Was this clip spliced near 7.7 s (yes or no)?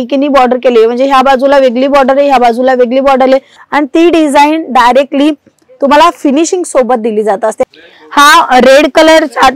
yes